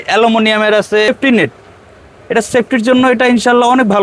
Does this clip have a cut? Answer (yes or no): yes